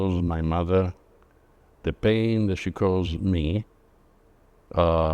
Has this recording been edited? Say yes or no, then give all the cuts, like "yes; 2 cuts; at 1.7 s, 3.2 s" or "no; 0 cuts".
no; 0 cuts